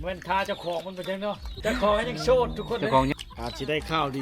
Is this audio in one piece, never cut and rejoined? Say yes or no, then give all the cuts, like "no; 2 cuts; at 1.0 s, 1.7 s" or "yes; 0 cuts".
no; 2 cuts; at 1.6 s, 3.1 s